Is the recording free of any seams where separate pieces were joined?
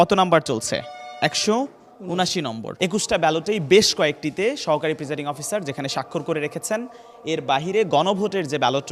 no; 1 cut; at 2.7 s

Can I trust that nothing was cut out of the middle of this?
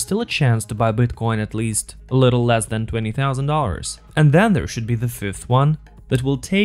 yes; 0 cuts

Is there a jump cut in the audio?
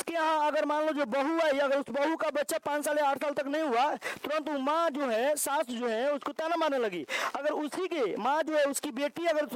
no; 0 cuts

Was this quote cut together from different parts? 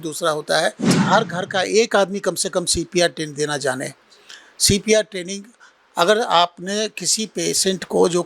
yes; 1 cut; at 0.9 s

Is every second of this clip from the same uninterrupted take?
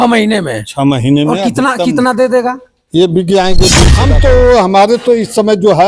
no; 1 cut; at 3.9 s

